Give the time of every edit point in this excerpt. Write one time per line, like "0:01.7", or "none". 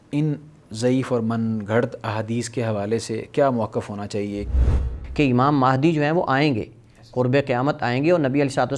0:04.5

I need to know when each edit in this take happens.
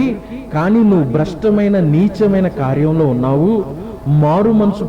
none

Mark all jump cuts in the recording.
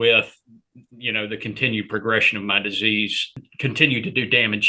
0:03.2

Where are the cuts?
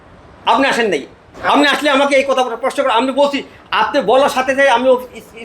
none

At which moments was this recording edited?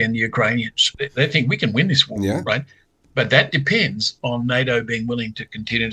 0:00.9

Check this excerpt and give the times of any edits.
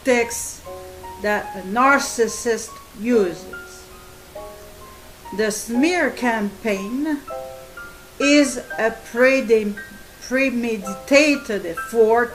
none

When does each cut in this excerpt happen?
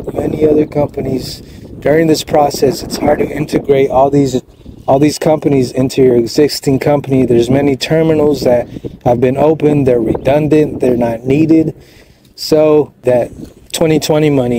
0:13.0

